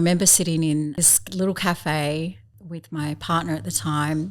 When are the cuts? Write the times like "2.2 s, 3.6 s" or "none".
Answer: 1.0 s, 2.6 s